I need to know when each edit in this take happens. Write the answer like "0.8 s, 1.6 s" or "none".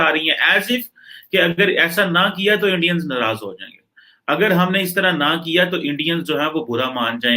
none